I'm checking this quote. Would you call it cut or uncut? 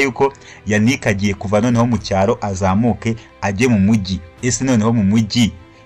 uncut